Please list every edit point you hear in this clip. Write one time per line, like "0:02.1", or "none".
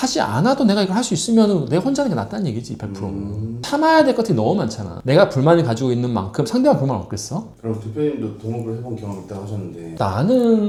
none

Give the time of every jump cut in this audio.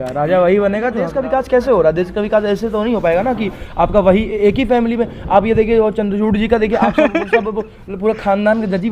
0:01.1

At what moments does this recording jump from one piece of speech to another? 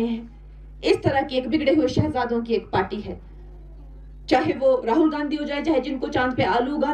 none

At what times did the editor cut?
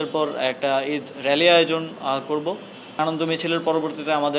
0:03.0

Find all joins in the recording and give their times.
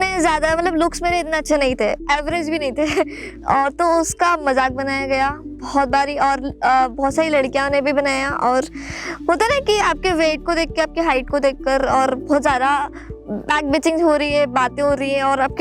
0:02.0

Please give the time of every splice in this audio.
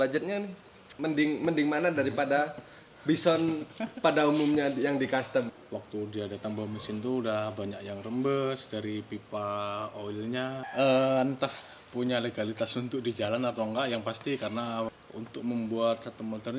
0:00.9
0:05.6
0:10.7
0:14.9

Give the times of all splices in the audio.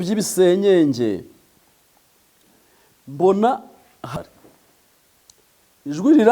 0:04.1

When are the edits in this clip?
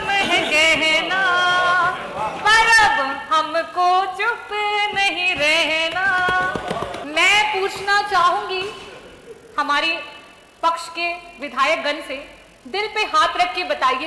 0:07.0

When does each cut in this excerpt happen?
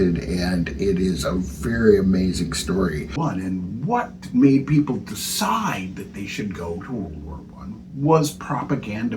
0:03.2

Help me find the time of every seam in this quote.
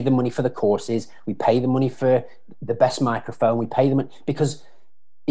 none

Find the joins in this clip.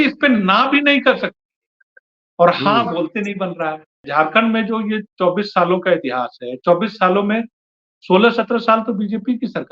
0:04.0

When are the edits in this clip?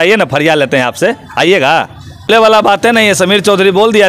0:02.3

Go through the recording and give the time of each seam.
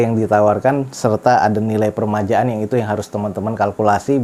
none

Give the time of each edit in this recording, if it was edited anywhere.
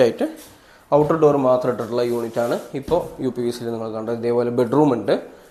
none

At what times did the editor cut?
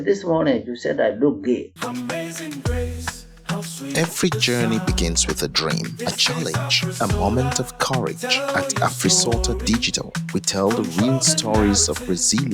0:01.7

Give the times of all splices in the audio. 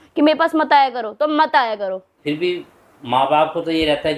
0:02.2

